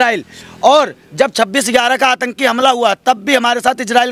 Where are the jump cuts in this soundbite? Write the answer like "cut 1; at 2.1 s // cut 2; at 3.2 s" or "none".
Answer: none